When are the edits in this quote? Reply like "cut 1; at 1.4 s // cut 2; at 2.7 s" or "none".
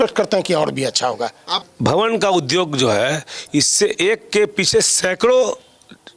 cut 1; at 1.5 s